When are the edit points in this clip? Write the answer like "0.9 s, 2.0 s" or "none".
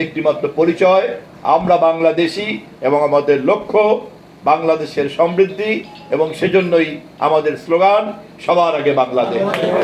none